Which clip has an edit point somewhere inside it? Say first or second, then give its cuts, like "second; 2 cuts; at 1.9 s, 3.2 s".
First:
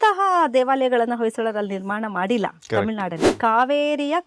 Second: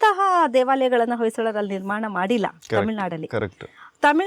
first; 1 cut; at 3.2 s